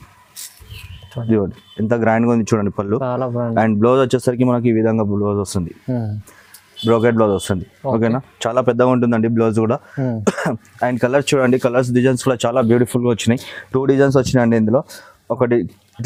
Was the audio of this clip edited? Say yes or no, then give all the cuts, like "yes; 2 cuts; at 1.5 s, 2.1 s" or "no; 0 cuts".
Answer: no; 0 cuts